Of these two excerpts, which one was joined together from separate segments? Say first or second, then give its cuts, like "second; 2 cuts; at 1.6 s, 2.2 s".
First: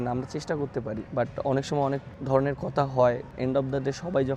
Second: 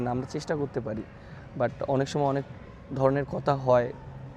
first; 3 cuts; at 1.0 s, 2.1 s, 3.3 s